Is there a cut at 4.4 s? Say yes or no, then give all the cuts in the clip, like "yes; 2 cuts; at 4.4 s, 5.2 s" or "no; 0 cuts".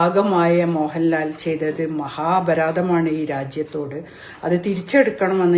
no; 0 cuts